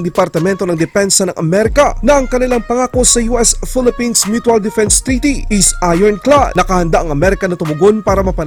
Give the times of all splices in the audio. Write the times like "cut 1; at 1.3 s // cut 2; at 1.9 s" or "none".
none